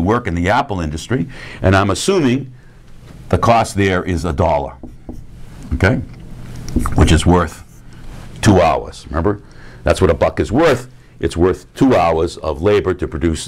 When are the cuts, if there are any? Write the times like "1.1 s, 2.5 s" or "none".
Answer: 11.5 s